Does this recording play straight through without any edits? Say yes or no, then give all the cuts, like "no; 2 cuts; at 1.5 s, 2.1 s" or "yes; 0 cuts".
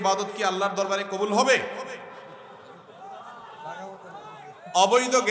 yes; 0 cuts